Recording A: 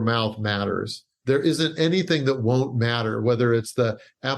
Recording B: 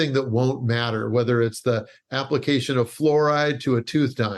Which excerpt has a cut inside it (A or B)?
A